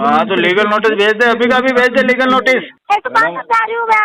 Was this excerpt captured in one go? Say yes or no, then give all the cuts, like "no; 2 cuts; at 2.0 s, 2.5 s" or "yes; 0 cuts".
no; 1 cut; at 2.7 s